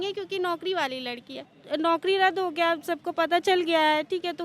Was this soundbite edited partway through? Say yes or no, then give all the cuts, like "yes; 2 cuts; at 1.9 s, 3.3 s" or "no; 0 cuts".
yes; 1 cut; at 1.5 s